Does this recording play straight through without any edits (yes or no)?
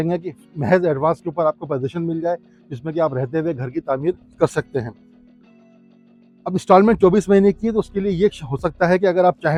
yes